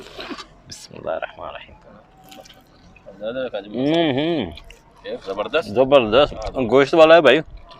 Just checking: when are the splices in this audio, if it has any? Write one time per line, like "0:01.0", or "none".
none